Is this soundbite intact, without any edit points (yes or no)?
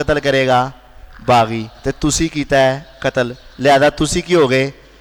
yes